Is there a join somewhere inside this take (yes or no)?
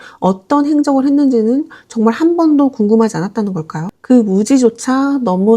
yes